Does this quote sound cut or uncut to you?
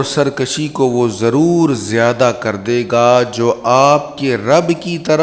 uncut